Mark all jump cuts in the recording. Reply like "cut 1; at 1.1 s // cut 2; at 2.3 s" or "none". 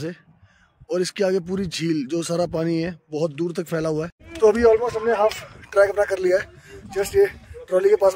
cut 1; at 4.2 s